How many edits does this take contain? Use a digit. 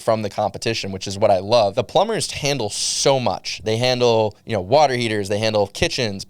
1